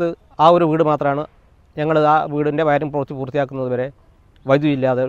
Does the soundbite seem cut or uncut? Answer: uncut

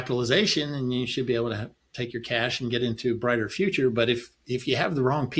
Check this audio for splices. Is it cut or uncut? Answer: uncut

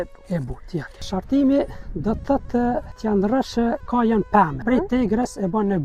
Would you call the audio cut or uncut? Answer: cut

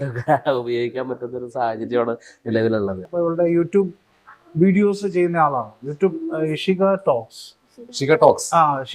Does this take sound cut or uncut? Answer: cut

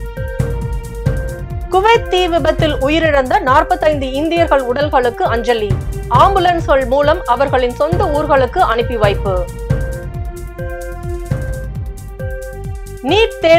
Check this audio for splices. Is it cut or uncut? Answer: cut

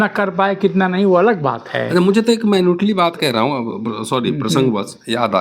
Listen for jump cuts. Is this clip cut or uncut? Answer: uncut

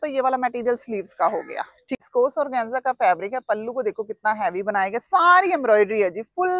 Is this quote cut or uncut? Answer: cut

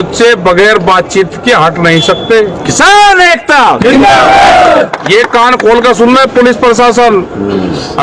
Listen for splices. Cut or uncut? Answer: uncut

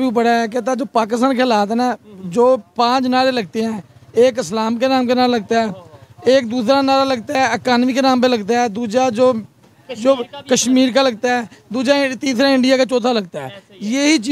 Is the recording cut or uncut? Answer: uncut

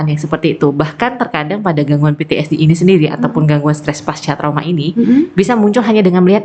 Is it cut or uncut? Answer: uncut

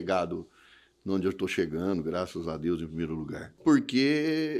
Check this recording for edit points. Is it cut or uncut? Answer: cut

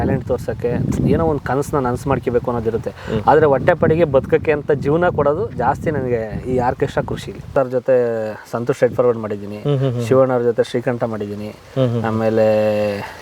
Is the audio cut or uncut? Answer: cut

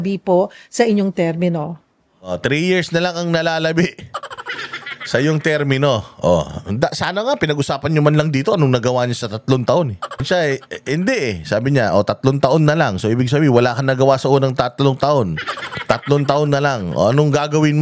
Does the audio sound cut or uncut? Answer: cut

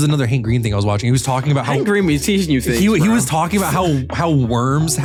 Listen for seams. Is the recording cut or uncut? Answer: uncut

